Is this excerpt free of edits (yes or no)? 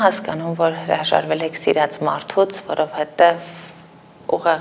yes